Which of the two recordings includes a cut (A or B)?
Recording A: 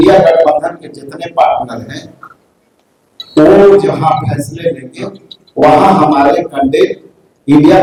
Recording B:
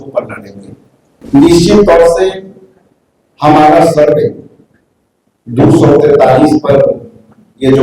B